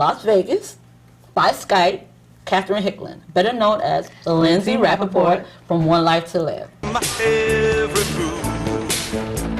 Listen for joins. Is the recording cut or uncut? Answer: uncut